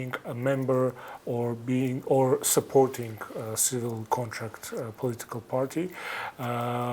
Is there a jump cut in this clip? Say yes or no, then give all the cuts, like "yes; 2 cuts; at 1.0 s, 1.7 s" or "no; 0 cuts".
no; 0 cuts